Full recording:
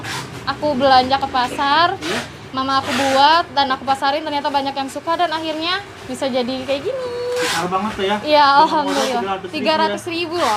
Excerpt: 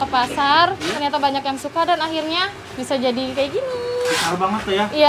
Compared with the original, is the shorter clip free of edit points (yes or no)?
no